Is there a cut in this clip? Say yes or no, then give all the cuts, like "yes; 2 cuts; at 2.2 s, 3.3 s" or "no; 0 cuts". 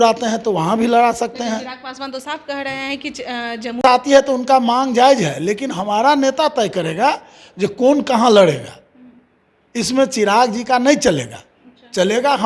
no; 0 cuts